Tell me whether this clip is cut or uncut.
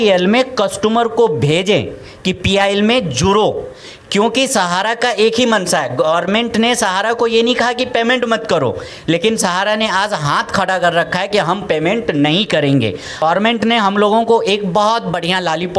cut